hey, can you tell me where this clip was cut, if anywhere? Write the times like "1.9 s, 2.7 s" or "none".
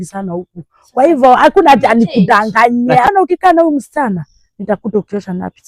3.1 s